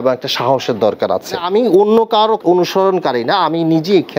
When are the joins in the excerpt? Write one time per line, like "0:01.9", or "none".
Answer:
0:01.4
0:02.4